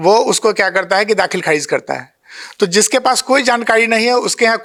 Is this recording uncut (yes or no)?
yes